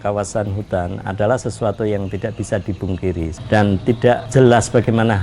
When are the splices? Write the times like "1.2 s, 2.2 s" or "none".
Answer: 3.4 s, 4.2 s